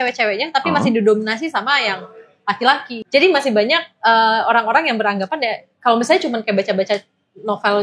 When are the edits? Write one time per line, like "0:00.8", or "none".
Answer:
0:03.0

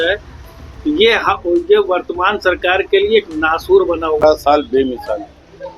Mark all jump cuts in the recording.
0:04.2

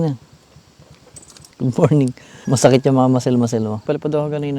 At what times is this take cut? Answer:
0:01.4
0:02.4
0:03.8

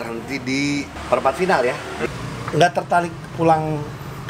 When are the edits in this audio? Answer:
0:01.9

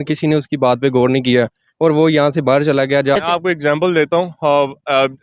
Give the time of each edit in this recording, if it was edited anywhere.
0:03.2

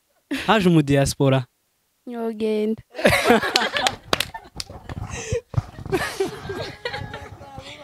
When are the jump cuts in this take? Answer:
none

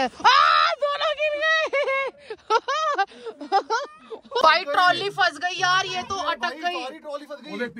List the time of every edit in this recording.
0:04.4

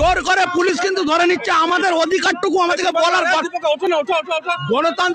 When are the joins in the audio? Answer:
none

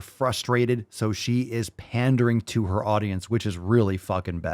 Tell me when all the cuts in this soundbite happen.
none

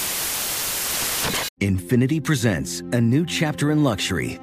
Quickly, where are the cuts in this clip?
0:01.5

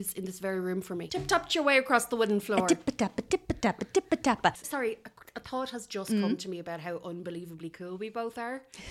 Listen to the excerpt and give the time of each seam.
0:04.6

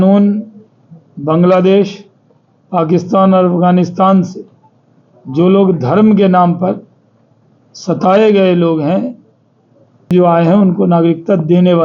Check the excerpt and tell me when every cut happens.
0:10.1

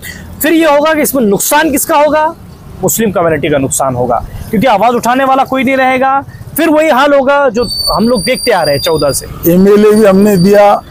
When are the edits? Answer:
0:09.3

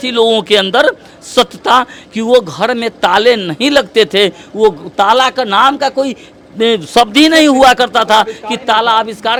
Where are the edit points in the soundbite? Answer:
none

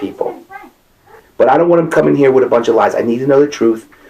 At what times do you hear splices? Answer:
0:01.2

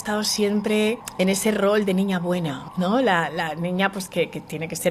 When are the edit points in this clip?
0:01.1
0:02.6

